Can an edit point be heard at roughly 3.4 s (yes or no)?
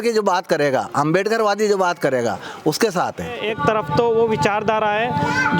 yes